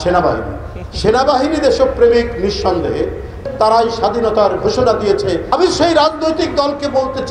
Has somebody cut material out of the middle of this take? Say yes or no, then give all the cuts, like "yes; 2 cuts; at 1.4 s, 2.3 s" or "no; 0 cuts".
yes; 2 cuts; at 3.4 s, 5.5 s